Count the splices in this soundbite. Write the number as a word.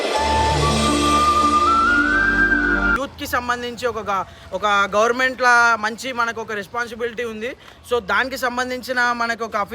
one